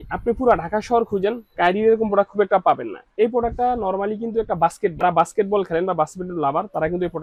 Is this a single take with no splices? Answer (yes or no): yes